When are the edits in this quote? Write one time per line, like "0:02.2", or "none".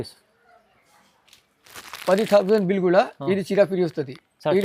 0:01.7